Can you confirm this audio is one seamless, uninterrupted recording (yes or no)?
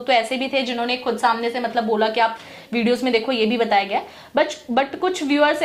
yes